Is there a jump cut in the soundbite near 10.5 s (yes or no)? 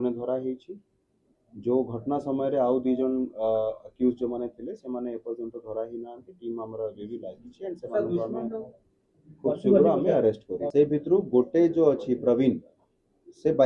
yes